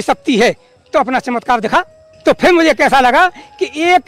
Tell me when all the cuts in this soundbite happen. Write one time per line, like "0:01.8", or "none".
0:02.0